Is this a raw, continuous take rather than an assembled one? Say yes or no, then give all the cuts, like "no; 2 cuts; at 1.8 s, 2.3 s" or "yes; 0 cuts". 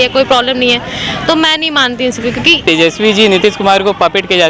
no; 1 cut; at 2.6 s